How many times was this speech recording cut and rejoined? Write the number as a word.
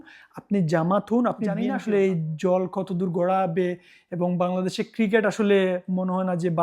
one